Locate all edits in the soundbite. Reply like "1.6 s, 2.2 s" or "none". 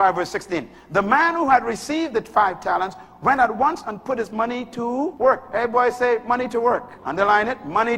5.1 s, 7.0 s